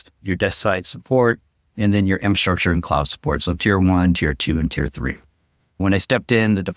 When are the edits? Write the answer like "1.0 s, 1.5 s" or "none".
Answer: 5.8 s